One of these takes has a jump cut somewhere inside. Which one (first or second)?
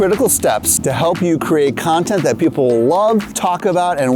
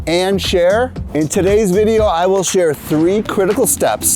second